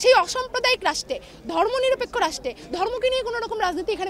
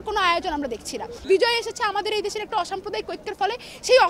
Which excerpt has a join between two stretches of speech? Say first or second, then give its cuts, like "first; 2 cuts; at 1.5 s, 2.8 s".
second; 1 cut; at 1.2 s